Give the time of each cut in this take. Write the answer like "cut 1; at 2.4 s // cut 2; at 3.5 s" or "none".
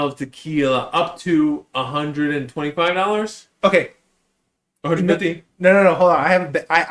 none